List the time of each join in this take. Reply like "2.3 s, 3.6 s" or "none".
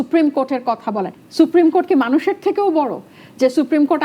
1.1 s

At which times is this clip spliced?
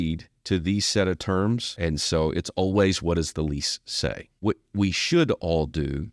1.7 s, 4.3 s

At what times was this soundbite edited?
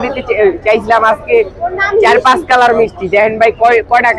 none

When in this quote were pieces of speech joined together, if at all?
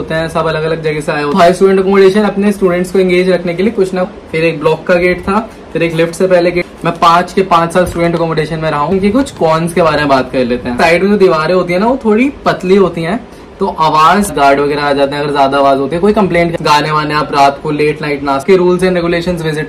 1.4 s, 4.1 s, 6.7 s, 8.9 s, 10.8 s, 14.3 s, 16.6 s, 18.4 s

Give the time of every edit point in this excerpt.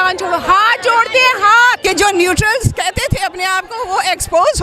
1.8 s

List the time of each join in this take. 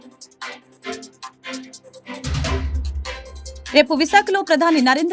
1.8 s

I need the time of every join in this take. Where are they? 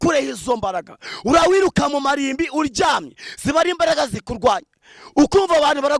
1.4 s

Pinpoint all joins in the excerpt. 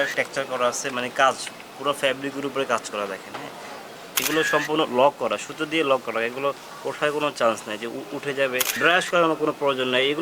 4.2 s, 8.7 s

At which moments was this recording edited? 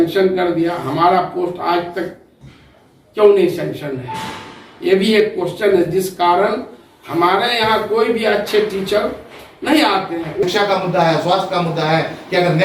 10.4 s

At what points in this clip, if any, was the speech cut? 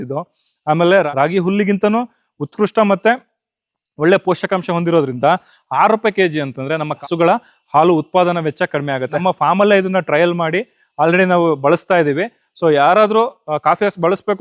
7.0 s, 9.2 s

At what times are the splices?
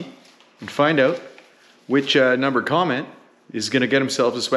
none

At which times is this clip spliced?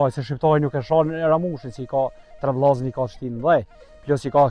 none

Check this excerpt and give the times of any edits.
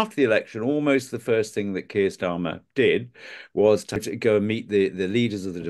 4.1 s

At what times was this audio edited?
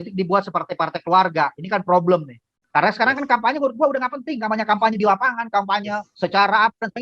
2.7 s

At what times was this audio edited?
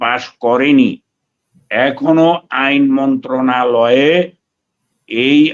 none

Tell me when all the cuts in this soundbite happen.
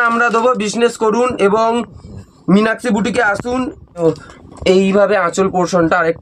4.0 s

